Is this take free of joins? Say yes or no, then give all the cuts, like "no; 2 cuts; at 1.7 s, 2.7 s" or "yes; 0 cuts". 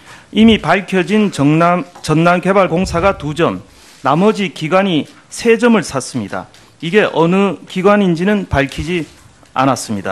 yes; 0 cuts